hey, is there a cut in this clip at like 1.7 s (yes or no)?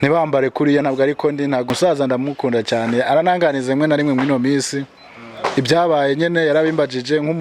yes